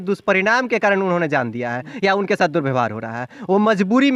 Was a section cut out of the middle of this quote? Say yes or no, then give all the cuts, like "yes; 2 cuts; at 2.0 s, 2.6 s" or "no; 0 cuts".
no; 0 cuts